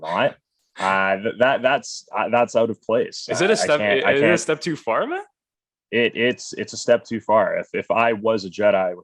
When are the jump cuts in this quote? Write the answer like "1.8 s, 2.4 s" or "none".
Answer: none

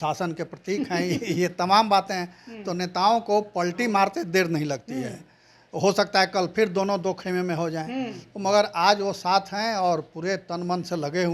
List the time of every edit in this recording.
none

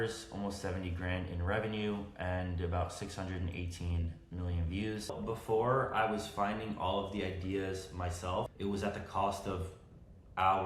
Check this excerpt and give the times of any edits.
5.2 s, 8.5 s

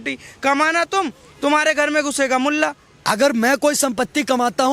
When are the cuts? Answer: 2.9 s

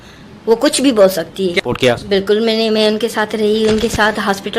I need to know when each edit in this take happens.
1.5 s

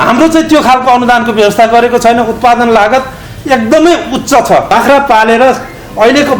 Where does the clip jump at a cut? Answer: 4.7 s

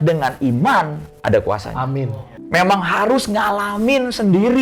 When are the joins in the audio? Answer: 2.3 s

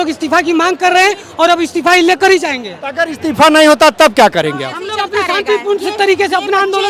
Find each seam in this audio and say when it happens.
none

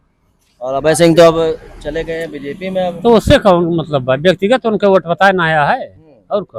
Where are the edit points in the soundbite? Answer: none

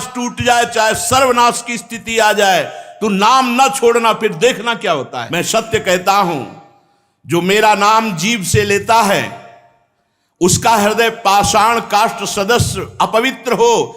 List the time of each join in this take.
5.2 s

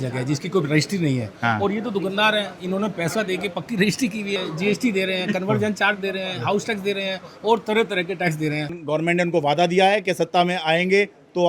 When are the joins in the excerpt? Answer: 4.4 s, 8.8 s

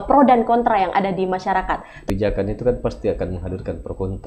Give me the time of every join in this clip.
2.0 s

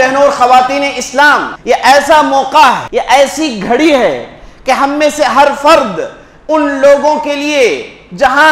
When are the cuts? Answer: 1.5 s, 2.8 s

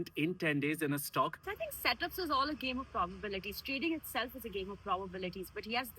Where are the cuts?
1.4 s

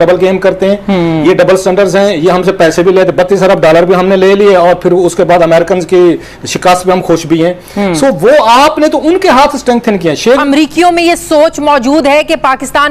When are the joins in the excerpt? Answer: 10.4 s

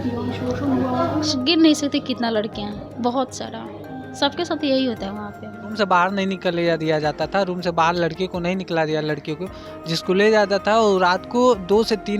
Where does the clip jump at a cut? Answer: 5.7 s

